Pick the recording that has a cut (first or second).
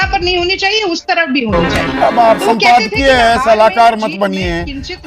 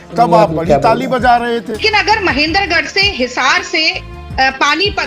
second